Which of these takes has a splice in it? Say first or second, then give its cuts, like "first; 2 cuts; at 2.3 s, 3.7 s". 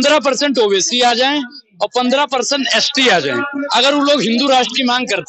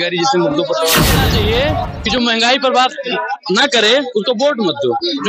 second; 1 cut; at 1.2 s